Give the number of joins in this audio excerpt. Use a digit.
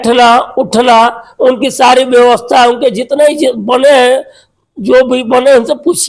0